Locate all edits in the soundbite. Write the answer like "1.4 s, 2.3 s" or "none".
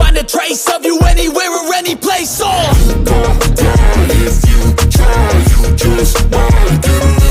none